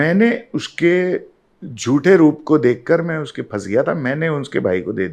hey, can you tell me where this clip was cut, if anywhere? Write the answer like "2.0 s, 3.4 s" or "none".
none